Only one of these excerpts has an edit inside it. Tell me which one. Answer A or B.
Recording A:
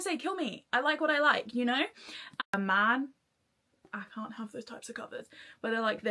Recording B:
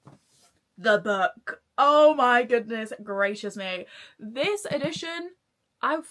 A